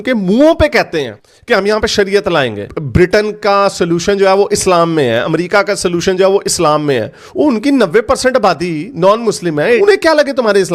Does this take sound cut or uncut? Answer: cut